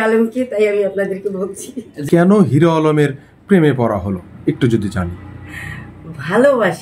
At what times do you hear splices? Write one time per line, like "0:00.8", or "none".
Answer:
0:02.0